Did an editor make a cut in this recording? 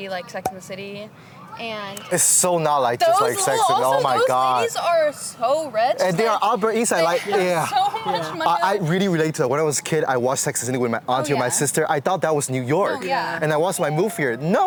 no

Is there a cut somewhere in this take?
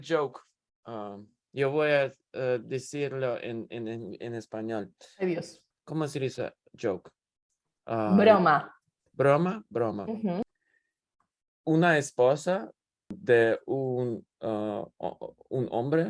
yes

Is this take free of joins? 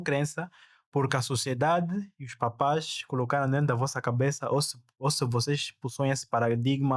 yes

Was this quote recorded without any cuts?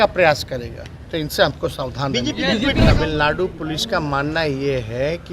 no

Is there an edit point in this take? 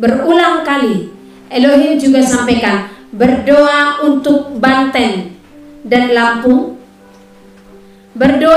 no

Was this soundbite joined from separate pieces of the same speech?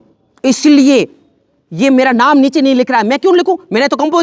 no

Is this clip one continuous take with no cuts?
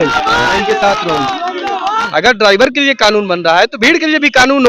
no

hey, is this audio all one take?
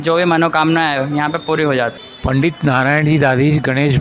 no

